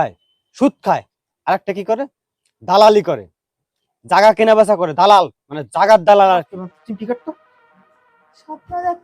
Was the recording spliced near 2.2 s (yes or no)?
no